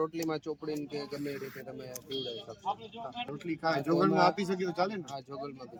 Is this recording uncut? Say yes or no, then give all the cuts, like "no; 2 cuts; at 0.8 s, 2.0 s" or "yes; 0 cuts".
yes; 0 cuts